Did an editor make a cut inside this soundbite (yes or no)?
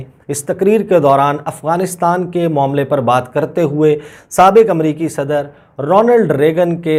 no